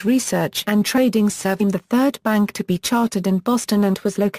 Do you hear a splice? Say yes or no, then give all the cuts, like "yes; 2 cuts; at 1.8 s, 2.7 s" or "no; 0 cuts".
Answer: no; 0 cuts